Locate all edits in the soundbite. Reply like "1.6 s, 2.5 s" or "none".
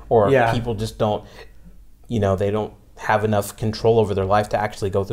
none